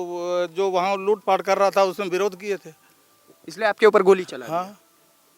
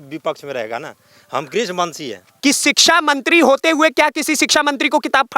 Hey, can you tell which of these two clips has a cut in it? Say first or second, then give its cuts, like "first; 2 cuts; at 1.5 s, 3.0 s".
second; 1 cut; at 2.3 s